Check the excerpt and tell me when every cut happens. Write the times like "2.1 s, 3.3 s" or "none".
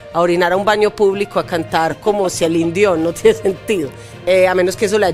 none